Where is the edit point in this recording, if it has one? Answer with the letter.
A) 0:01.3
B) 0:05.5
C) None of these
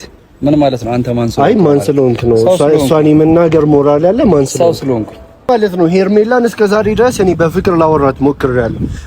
B